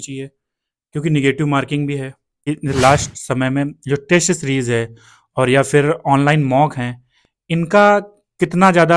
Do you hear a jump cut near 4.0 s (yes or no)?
no